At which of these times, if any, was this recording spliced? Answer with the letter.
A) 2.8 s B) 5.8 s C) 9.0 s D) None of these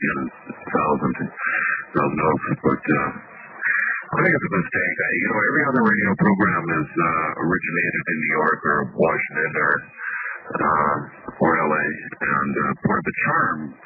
A